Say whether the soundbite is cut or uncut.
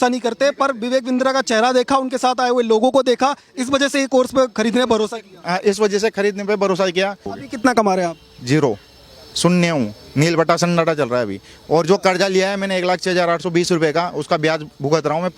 cut